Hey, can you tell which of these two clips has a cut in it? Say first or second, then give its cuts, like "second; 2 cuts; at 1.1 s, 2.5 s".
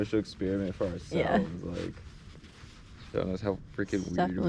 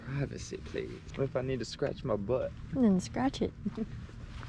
second; 1 cut; at 1.0 s